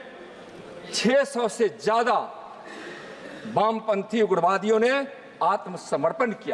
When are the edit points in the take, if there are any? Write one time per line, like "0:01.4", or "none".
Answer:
none